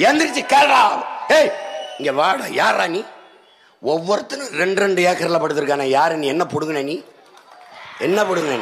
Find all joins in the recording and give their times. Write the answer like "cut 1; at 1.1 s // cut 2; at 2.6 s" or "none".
none